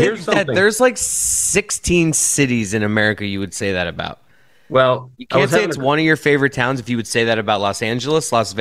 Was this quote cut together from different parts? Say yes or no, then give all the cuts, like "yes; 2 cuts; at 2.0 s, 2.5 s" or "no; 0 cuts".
no; 0 cuts